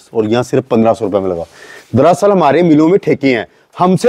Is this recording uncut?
yes; 0 cuts

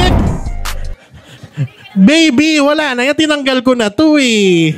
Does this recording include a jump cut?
no; 0 cuts

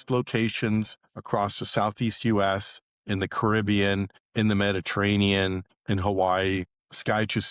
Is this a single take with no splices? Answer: yes; 0 cuts

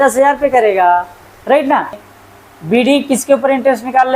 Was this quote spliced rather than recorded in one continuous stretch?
yes; 1 cut; at 2.0 s

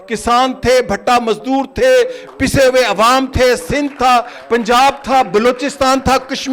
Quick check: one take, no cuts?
yes; 0 cuts

